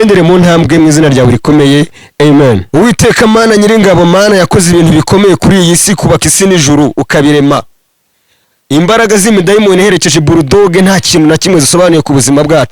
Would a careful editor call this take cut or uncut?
cut